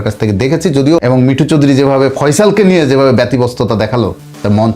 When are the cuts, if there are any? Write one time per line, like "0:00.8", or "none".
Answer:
0:01.0